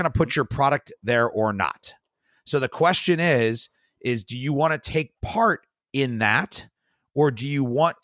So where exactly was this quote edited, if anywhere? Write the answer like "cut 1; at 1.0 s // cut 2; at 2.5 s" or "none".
none